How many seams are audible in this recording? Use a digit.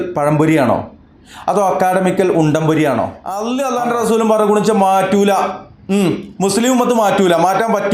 1